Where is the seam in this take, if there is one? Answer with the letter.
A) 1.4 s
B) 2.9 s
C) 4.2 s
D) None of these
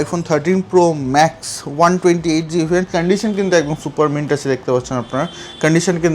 B